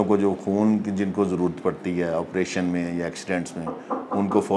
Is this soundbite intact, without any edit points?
yes; 0 cuts

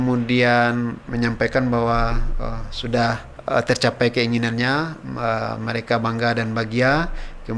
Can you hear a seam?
yes; 2 cuts; at 1.0 s, 3.3 s

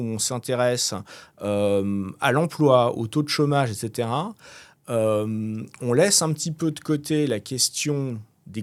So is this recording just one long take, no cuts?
yes; 0 cuts

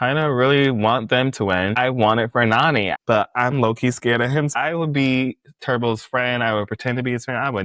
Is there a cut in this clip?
yes; 3 cuts; at 1.8 s, 2.9 s, 4.5 s

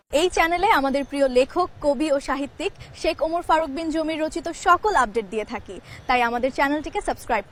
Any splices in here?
no; 0 cuts

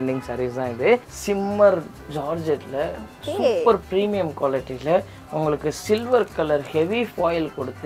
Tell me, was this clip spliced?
yes; 1 cut; at 1.1 s

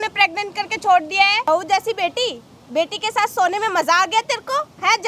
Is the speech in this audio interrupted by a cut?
yes; 1 cut; at 1.5 s

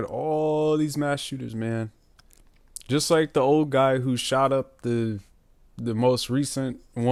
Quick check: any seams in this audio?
no; 0 cuts

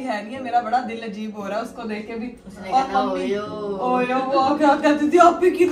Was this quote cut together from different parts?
no; 0 cuts

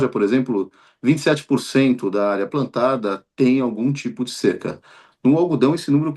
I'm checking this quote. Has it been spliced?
no; 0 cuts

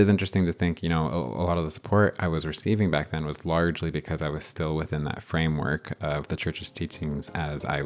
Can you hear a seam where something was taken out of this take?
no; 0 cuts

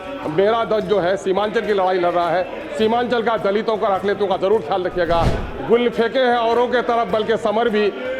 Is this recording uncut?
yes; 0 cuts

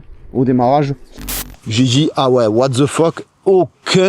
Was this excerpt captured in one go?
no; 1 cut; at 1.4 s

